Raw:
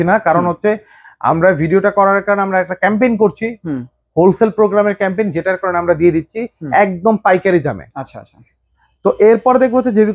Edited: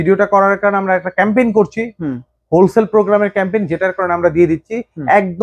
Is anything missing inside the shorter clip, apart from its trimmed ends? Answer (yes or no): no